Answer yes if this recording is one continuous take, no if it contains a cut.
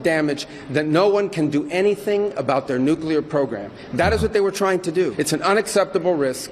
no